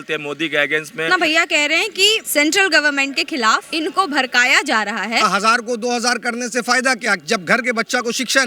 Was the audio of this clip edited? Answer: yes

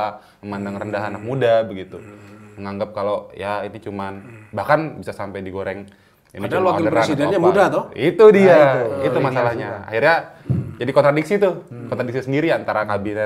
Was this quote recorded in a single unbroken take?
yes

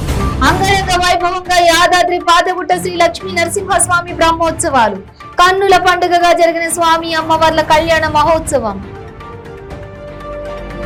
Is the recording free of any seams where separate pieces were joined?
yes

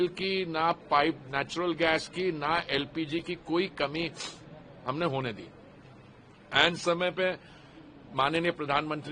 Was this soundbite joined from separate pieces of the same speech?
no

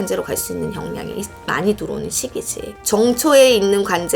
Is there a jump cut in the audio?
yes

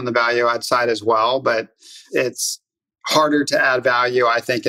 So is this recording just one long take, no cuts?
no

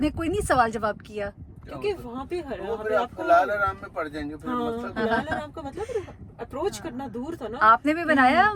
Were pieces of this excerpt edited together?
no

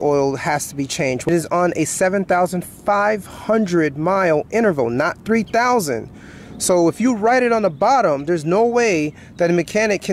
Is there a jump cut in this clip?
yes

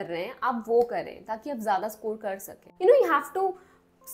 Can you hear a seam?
yes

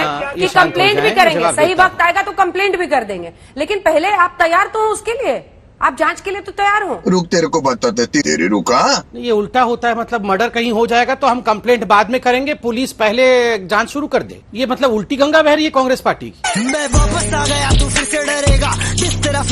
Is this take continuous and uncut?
yes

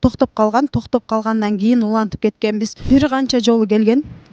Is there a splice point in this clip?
yes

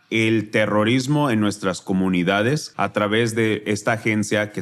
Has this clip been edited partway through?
yes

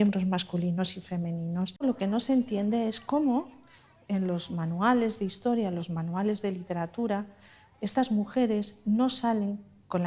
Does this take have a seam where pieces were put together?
yes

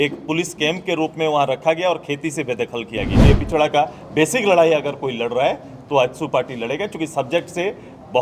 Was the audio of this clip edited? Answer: yes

